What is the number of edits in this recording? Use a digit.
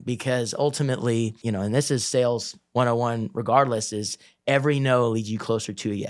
1